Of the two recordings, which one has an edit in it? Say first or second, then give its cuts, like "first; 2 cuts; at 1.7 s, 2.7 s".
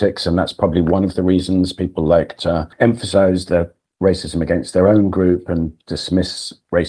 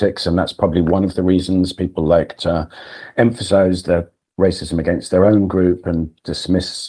first; 1 cut; at 2.7 s